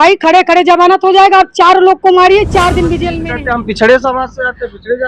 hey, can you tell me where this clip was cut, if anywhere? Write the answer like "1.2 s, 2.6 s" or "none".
3.2 s